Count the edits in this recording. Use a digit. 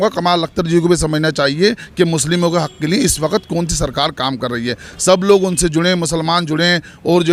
0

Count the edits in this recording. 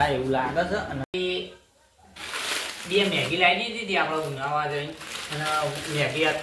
1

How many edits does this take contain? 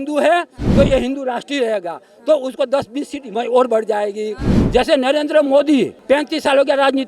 2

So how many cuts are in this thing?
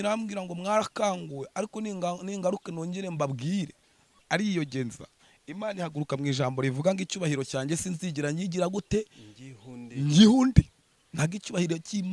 1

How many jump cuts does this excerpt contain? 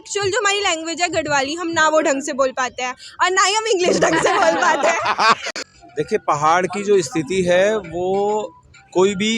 1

